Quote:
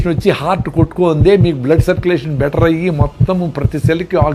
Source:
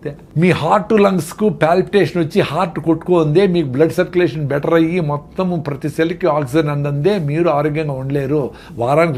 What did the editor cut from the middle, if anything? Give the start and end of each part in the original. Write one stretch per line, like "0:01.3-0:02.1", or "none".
none